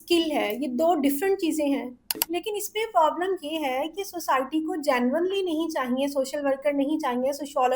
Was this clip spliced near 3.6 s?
no; 1 cut; at 2.2 s

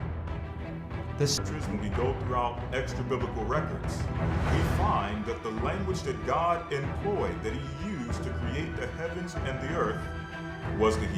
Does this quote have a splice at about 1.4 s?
yes; 1 cut; at 1.4 s

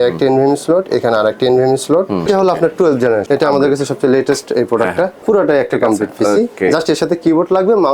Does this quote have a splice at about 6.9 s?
no; 3 cuts; at 2.3 s, 3.2 s, 5.2 s

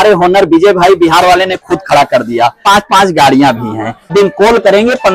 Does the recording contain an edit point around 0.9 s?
no; 2 cuts; at 2.6 s, 4.1 s

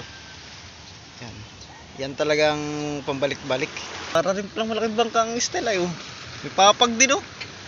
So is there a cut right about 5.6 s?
no; 1 cut; at 4.2 s

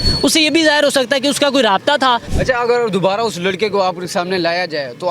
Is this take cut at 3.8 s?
no; 1 cut; at 2.3 s

